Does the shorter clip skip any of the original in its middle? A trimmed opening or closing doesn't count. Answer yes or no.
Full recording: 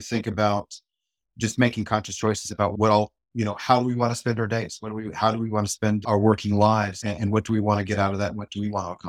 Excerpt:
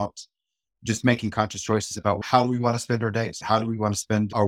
yes